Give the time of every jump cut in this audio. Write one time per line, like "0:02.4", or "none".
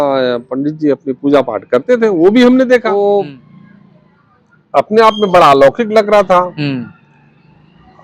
none